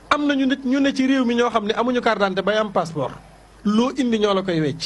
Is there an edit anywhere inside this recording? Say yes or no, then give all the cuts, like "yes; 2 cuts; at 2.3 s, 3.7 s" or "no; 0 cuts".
no; 0 cuts